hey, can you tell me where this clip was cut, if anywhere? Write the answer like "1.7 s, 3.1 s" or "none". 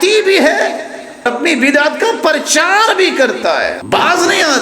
1.3 s, 3.8 s